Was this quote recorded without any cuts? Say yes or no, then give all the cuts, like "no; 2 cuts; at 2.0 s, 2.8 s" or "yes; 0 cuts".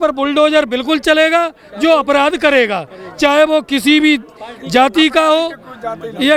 yes; 0 cuts